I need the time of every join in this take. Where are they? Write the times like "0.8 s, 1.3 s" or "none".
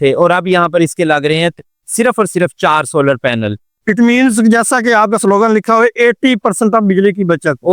3.7 s